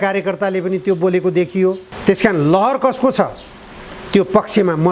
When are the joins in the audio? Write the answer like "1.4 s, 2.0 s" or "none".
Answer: 1.9 s